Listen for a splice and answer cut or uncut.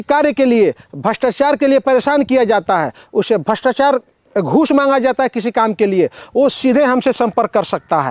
uncut